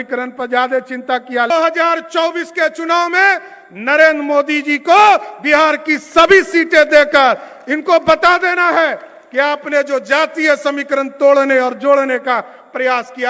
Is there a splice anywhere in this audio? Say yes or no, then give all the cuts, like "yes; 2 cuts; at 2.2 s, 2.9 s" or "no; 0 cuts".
yes; 1 cut; at 1.5 s